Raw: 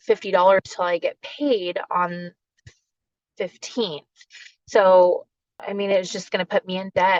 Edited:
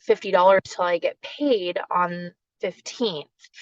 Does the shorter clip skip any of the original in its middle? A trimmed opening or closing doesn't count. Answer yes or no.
yes